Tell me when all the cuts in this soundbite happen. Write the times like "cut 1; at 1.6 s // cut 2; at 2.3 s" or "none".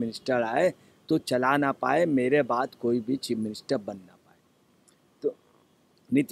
none